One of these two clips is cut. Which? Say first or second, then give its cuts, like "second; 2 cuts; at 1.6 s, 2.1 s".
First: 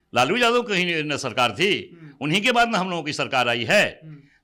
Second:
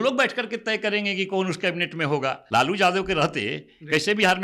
second; 1 cut; at 2.4 s